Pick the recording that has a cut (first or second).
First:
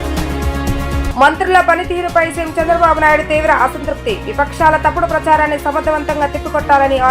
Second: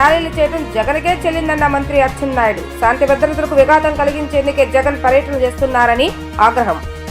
first